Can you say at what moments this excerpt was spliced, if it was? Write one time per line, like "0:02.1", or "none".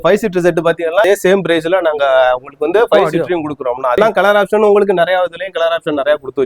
0:01.0
0:04.0